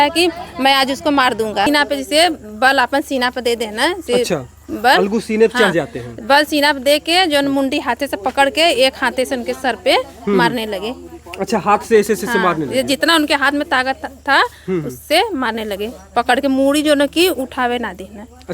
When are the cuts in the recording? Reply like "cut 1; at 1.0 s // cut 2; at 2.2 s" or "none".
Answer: cut 1; at 1.7 s

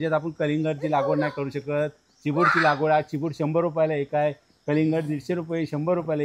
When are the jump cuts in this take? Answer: none

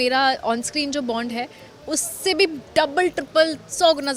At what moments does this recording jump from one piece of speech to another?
none

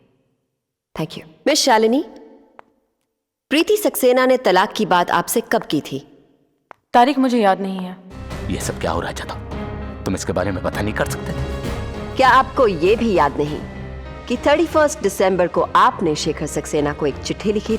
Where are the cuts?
cut 1; at 1.2 s // cut 2; at 8.3 s

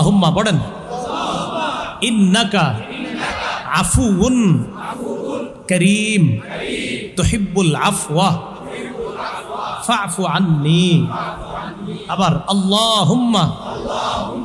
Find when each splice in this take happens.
none

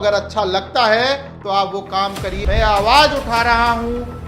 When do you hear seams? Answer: cut 1; at 2.3 s

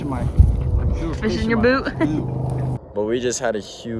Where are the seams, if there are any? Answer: cut 1; at 2.7 s

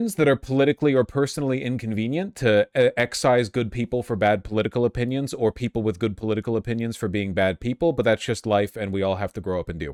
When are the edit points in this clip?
none

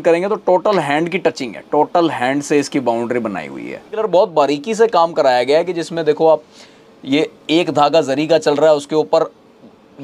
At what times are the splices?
cut 1; at 4.0 s

